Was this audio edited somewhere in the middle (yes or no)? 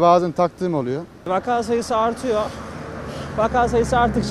yes